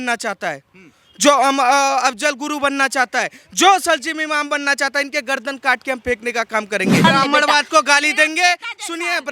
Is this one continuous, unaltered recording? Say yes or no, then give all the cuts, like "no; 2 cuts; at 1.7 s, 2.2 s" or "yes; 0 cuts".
no; 1 cut; at 7.0 s